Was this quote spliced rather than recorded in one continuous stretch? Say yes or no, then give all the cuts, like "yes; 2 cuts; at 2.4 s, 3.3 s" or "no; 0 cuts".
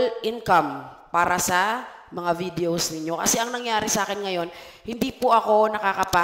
no; 0 cuts